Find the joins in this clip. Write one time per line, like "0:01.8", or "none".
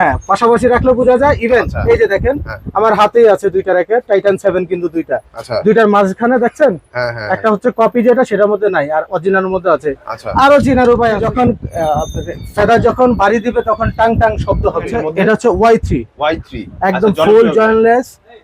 0:11.2
0:15.0